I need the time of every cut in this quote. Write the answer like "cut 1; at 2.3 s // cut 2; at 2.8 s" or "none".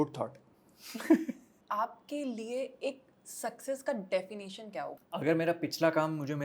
cut 1; at 1.5 s // cut 2; at 5.0 s